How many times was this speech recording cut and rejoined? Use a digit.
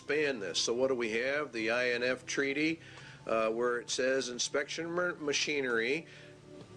1